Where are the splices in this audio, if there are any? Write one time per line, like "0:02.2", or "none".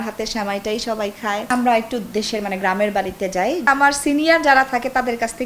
0:01.5
0:03.7